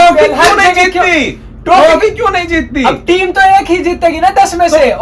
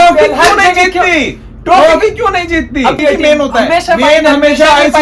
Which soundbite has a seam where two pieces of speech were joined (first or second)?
second